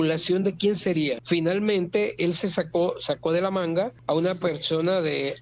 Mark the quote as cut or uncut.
cut